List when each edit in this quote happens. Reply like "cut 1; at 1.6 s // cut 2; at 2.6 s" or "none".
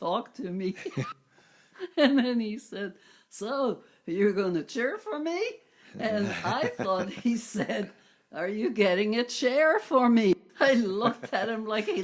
cut 1; at 1.1 s // cut 2; at 10.3 s